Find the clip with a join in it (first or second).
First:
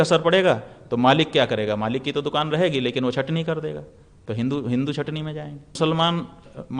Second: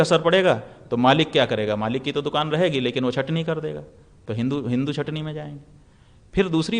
first